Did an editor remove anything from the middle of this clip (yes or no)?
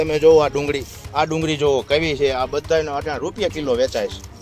yes